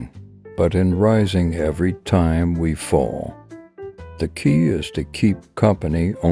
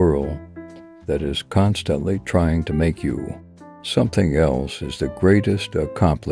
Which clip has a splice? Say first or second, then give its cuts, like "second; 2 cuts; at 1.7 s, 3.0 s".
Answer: first; 1 cut; at 4.0 s